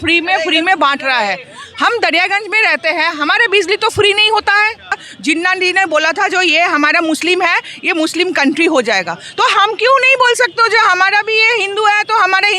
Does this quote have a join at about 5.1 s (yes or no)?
yes